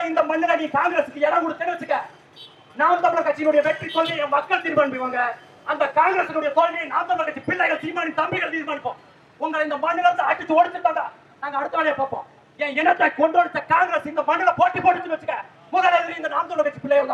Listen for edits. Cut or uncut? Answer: uncut